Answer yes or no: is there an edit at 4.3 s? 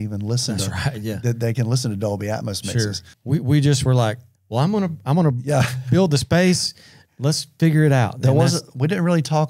no